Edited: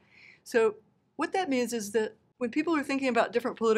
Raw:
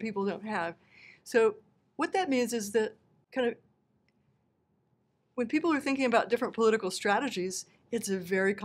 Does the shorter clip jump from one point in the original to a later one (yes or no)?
yes